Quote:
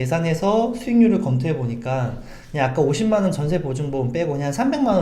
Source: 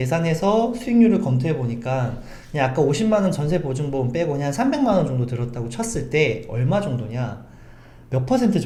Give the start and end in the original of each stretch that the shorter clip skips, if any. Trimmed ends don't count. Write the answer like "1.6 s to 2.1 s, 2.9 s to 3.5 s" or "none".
none